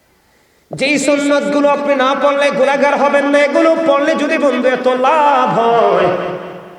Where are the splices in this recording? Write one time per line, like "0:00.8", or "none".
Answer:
none